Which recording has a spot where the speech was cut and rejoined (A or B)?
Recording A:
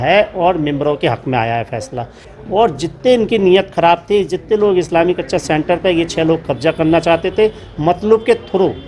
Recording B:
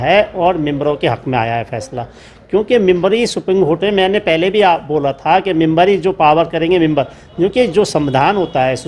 A